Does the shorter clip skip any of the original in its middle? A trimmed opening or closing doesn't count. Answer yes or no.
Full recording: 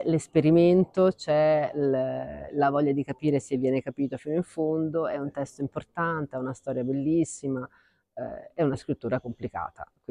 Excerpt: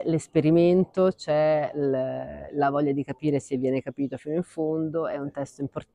no